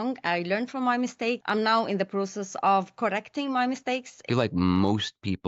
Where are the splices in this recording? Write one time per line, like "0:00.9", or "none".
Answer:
0:01.4
0:04.2